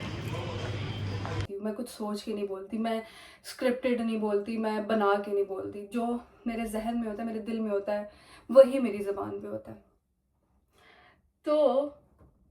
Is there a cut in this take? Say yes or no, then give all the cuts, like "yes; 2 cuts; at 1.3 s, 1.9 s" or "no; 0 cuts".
yes; 1 cut; at 1.4 s